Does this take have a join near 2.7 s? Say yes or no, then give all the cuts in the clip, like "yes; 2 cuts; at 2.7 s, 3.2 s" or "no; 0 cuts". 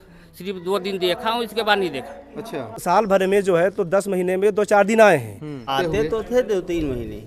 yes; 2 cuts; at 2.7 s, 5.7 s